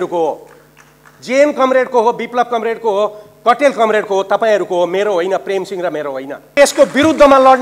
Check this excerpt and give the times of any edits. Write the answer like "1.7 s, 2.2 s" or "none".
6.6 s